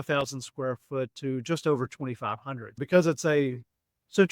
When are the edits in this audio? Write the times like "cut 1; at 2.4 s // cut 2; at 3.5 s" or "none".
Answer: cut 1; at 2.8 s